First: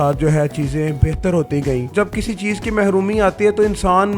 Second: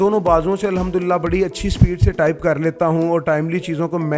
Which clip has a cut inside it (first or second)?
first